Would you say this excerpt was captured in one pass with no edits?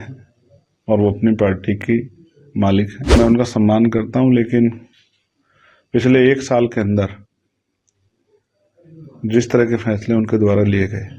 no; 1 cut; at 3.2 s

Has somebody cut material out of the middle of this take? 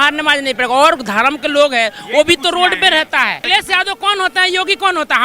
yes; 1 cut; at 3.4 s

